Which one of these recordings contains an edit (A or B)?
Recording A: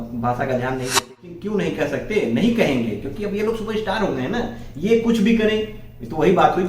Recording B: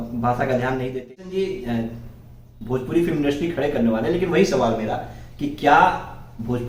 A